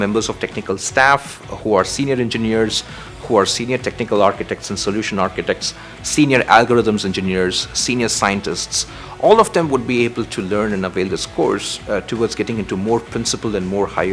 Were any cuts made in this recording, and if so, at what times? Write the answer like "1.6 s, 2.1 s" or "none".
none